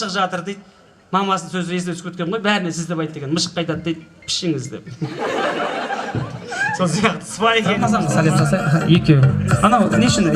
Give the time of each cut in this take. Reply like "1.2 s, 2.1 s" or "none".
7.8 s